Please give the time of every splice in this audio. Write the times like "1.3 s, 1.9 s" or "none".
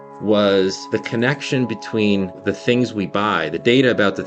0.8 s, 2.4 s